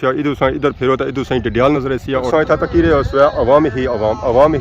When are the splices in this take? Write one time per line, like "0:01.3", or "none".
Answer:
0:02.3